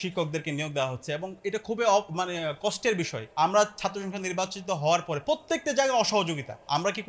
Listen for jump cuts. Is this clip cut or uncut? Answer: uncut